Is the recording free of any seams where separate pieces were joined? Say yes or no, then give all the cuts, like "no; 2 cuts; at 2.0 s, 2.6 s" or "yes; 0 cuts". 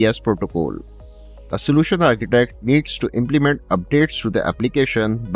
yes; 0 cuts